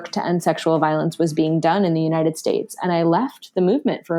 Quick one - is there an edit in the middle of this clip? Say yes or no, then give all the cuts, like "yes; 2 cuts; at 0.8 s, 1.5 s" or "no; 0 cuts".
no; 0 cuts